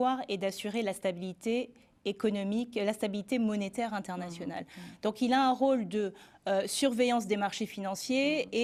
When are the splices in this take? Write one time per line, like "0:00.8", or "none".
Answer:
none